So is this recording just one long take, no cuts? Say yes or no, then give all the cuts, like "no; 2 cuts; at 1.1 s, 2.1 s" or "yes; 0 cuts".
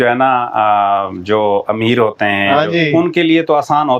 yes; 0 cuts